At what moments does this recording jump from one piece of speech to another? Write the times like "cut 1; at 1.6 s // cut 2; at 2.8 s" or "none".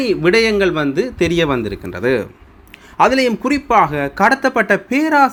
none